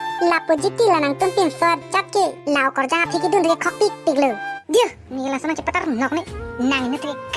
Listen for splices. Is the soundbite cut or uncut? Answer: cut